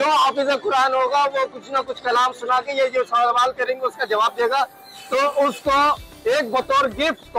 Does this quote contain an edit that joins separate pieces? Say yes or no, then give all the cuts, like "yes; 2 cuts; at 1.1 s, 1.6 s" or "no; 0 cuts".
no; 0 cuts